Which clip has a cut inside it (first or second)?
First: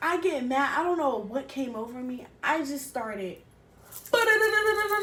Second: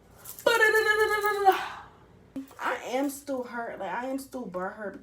second